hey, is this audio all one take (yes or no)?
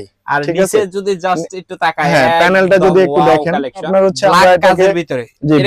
no